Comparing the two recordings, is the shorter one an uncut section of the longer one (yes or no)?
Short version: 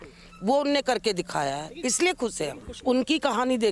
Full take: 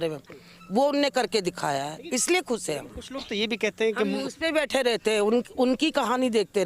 no